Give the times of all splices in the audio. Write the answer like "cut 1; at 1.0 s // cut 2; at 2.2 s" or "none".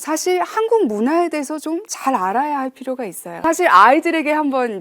cut 1; at 3.4 s